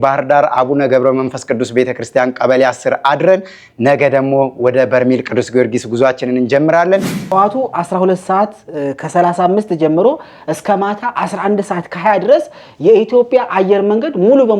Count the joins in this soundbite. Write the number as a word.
one